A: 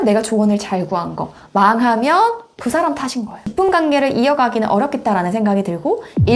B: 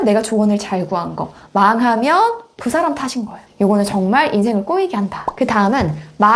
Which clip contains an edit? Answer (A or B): A